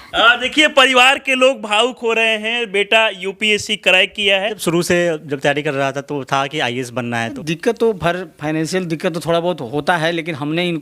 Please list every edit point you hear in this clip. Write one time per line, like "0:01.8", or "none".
0:04.6
0:07.3